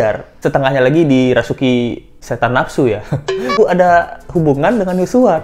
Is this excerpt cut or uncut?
cut